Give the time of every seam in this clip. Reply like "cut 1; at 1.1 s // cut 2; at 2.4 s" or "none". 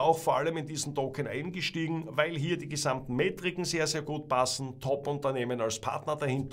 none